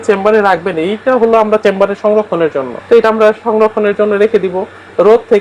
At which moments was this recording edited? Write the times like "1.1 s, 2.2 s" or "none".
2.7 s